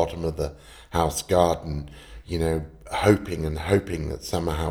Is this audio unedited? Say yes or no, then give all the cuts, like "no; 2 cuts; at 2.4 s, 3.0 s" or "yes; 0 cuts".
yes; 0 cuts